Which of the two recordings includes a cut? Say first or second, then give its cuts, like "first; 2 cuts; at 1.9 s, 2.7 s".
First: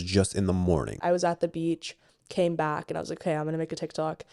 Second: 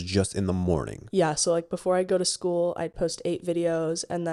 first; 1 cut; at 1.0 s